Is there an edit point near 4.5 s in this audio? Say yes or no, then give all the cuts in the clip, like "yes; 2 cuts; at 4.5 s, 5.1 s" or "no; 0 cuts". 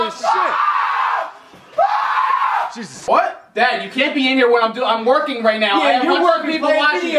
yes; 1 cut; at 4.5 s